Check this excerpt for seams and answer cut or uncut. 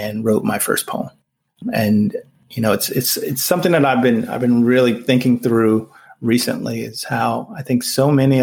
cut